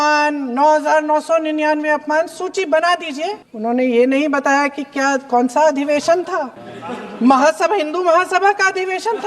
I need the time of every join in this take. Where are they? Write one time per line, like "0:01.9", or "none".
0:03.4

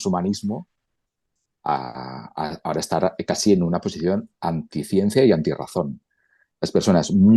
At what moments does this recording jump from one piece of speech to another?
0:06.4

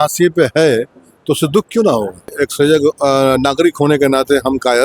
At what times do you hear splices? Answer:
0:02.3

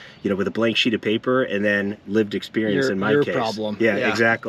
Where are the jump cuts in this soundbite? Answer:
none

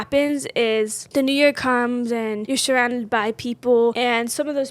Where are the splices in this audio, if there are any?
0:01.0
0:02.4
0:04.0

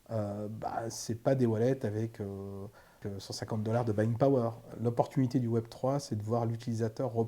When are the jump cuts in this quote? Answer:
0:03.0
0:04.7

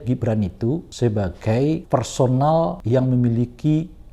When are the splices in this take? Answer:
0:00.9
0:01.8
0:02.8

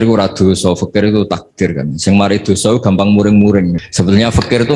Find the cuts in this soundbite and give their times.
0:03.8

